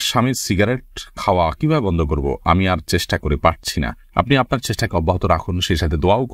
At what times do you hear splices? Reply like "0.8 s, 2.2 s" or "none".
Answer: none